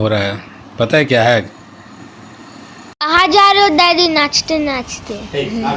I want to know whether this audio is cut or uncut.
cut